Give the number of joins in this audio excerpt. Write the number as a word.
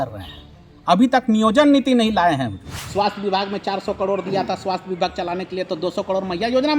one